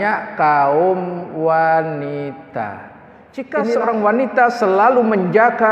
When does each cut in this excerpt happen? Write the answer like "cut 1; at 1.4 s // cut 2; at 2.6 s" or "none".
cut 1; at 3.5 s